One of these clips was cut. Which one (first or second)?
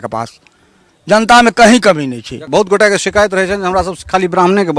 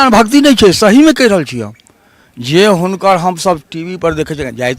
first